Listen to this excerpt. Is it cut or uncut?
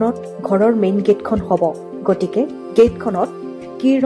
uncut